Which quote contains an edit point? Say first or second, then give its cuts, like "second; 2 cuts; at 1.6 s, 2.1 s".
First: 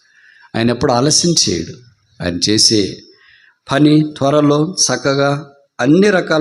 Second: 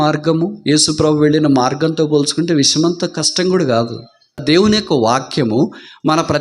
second; 1 cut; at 4.4 s